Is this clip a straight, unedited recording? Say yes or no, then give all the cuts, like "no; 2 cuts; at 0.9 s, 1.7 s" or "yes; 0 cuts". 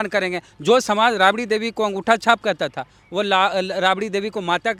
yes; 0 cuts